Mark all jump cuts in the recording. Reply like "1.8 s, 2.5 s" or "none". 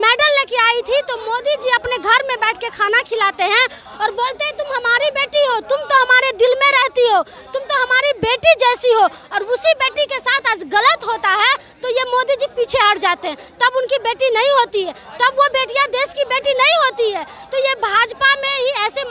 none